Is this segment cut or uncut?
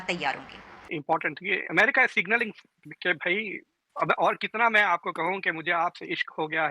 cut